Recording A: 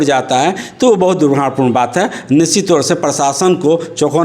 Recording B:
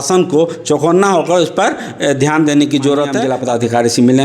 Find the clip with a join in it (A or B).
B